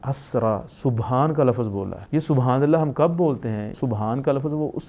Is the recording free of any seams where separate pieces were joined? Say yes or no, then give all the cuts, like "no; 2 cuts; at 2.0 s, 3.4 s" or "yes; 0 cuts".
no; 2 cuts; at 1.9 s, 3.7 s